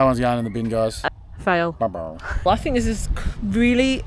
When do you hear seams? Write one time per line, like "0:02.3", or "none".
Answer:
0:01.0
0:02.4